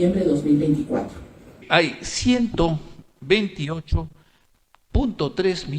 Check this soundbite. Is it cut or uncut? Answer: cut